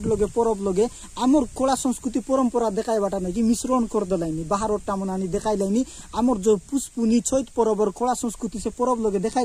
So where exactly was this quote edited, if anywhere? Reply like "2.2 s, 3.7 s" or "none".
none